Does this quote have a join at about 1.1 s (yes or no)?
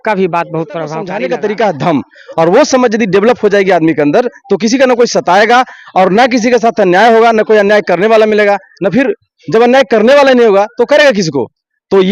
yes